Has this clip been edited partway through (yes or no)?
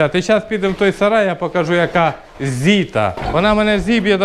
yes